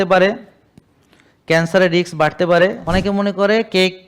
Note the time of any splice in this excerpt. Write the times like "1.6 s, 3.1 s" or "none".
2.8 s